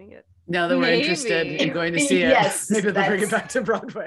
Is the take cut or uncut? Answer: uncut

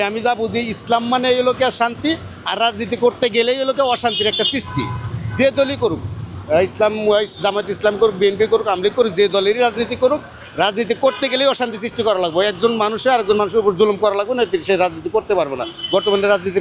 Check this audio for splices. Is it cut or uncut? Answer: uncut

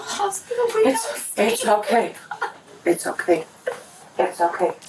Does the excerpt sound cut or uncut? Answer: uncut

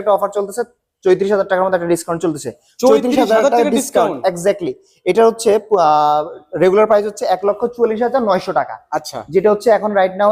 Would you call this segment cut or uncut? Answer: uncut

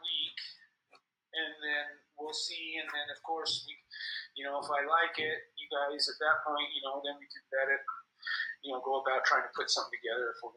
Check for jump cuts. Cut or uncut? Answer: uncut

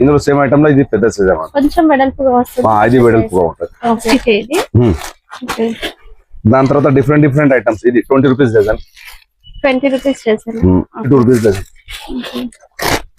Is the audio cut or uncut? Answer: cut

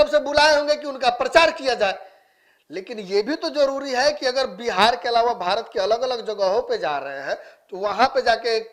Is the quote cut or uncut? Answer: uncut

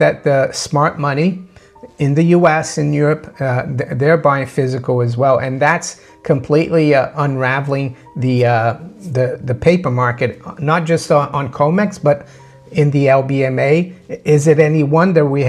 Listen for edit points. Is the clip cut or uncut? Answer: uncut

